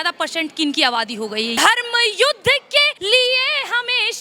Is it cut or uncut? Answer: cut